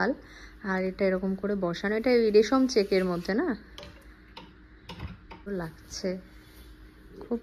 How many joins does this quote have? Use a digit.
1